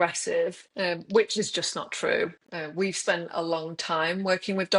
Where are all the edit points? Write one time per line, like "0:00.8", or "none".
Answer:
none